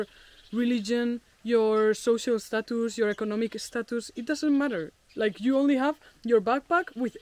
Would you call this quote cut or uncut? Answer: uncut